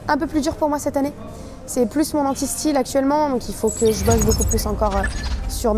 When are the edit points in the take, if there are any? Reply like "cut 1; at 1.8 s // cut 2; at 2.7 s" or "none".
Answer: none